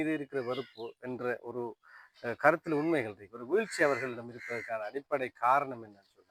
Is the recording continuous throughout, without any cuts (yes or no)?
yes